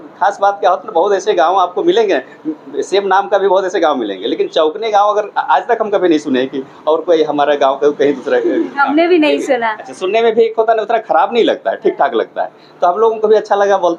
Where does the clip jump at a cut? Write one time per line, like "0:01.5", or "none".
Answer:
none